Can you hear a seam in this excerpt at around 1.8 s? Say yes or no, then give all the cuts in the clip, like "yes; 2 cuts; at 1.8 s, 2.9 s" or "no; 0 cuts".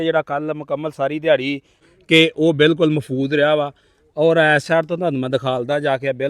yes; 1 cut; at 1.8 s